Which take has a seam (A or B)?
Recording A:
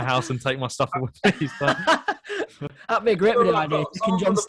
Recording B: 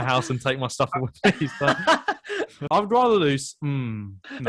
B